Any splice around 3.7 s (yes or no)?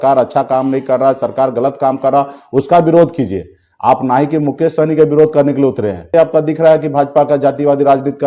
no